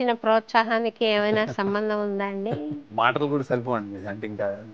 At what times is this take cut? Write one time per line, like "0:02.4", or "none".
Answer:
0:02.9